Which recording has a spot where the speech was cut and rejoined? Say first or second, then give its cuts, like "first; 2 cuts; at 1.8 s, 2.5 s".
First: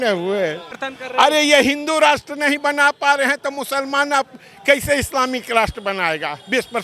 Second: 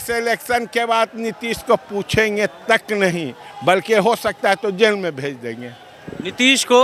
first; 1 cut; at 0.9 s